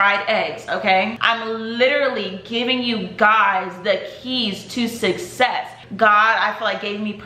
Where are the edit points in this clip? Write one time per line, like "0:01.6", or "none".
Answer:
0:01.2
0:05.8